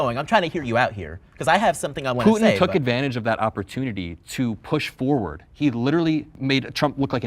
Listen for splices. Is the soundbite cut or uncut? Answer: cut